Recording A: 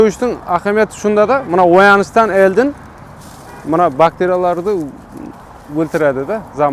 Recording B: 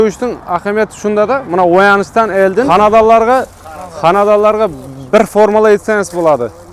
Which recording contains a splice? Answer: B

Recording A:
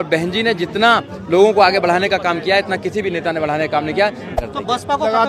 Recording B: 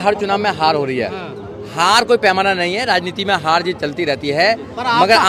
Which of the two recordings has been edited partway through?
A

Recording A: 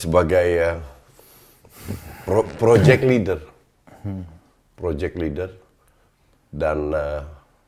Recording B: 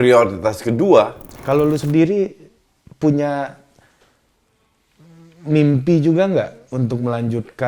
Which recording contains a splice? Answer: B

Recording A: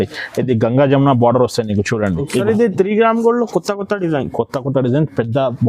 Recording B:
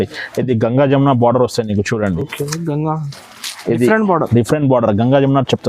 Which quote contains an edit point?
A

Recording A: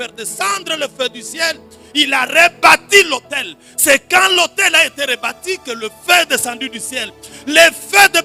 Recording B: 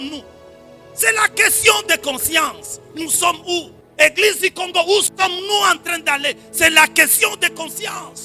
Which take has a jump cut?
B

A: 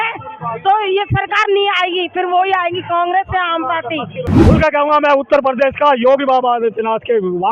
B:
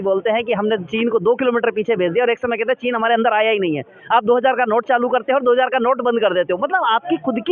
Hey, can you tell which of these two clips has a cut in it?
A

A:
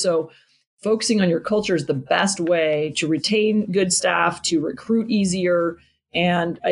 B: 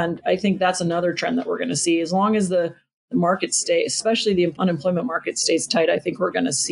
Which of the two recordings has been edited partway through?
B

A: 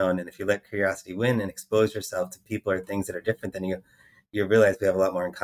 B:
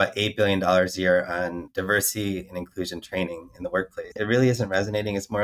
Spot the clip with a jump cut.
B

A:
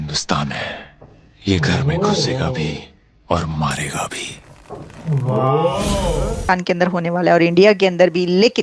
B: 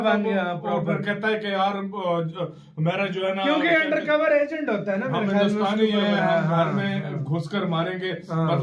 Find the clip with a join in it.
A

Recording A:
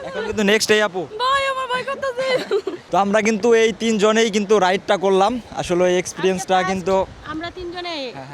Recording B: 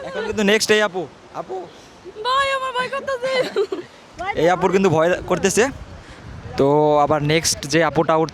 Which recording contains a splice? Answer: A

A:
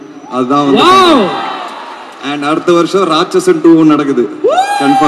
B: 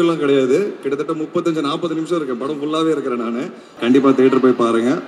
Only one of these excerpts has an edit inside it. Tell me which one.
B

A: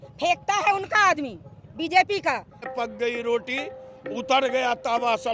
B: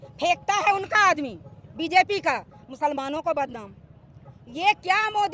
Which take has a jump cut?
A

